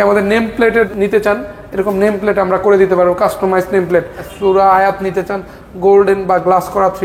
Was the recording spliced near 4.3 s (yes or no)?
yes